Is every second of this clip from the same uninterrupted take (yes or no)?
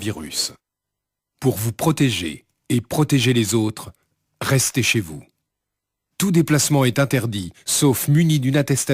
yes